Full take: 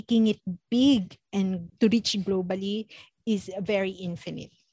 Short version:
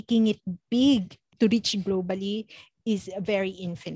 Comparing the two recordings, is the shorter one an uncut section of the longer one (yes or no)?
no